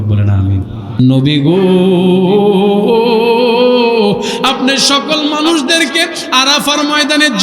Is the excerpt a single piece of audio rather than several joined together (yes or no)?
no